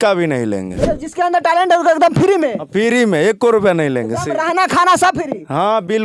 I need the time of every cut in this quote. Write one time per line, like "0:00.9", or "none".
none